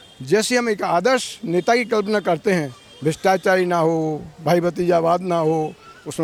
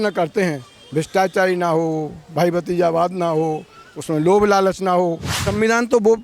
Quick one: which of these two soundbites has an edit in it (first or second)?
second